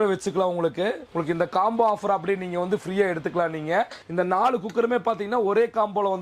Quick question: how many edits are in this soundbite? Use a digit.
2